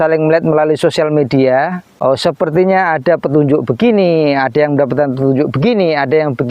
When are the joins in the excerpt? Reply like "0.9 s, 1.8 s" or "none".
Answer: 1.8 s